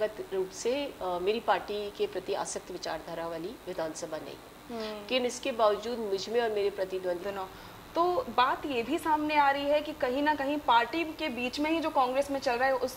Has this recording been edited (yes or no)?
yes